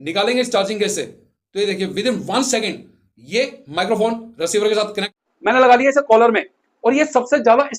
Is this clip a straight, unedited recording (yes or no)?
no